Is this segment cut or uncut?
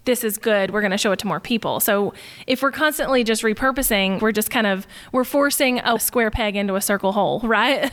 cut